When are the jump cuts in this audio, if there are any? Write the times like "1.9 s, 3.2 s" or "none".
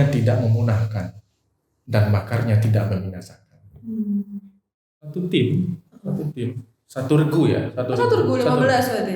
4.8 s